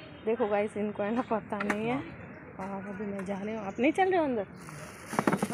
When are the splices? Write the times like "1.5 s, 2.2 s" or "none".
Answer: none